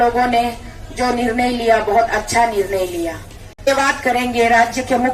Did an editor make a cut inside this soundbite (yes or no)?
yes